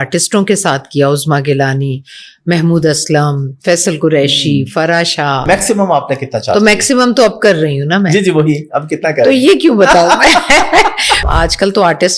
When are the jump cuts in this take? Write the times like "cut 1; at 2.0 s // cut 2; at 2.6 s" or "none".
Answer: cut 1; at 5.4 s // cut 2; at 11.2 s